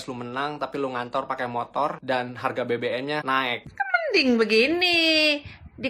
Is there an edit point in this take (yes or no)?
yes